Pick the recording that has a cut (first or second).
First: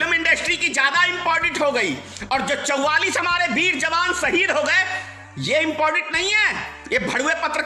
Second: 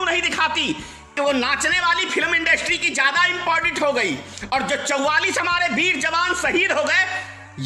second